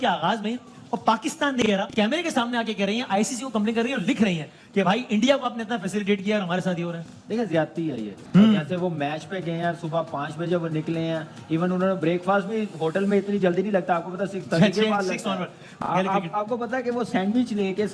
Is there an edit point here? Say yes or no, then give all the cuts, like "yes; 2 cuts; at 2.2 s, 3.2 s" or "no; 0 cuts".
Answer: no; 0 cuts